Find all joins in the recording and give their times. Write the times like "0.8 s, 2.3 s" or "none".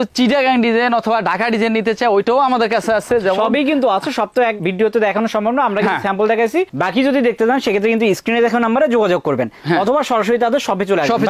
none